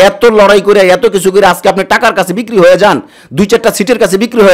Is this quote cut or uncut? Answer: uncut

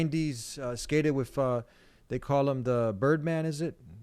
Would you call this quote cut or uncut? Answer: uncut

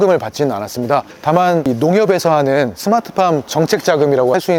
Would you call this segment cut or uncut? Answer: uncut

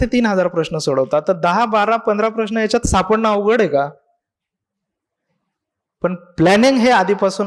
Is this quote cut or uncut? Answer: uncut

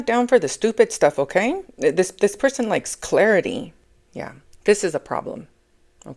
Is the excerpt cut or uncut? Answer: cut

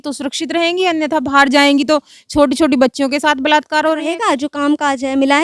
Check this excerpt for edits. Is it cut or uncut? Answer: cut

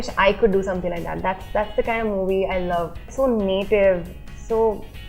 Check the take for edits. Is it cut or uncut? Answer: cut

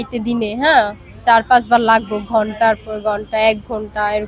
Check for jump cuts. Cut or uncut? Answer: uncut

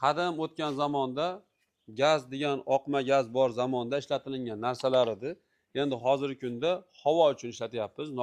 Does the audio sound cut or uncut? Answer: uncut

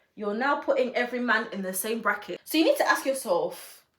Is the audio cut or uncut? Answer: cut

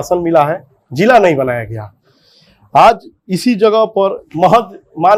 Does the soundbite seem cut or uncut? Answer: uncut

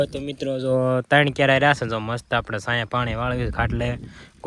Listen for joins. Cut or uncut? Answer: uncut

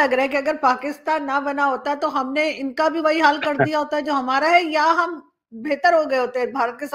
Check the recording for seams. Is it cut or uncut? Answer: uncut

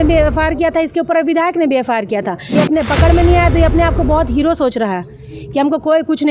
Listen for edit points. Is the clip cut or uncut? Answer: cut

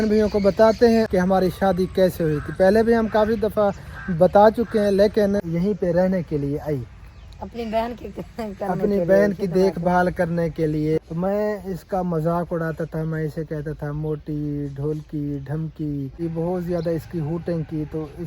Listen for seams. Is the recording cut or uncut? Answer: cut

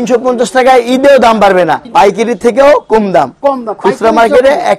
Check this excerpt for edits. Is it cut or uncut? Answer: cut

